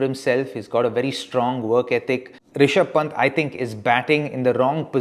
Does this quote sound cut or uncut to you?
cut